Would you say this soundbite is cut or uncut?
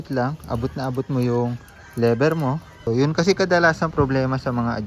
cut